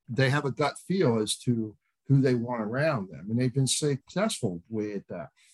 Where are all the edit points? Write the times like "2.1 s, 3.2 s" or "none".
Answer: none

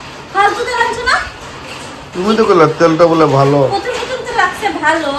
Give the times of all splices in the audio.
none

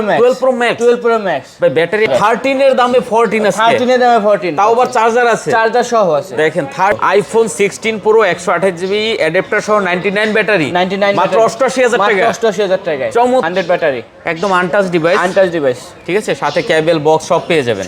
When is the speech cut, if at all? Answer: 2.1 s, 7.0 s, 13.5 s

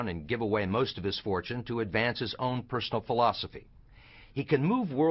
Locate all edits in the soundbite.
2.6 s

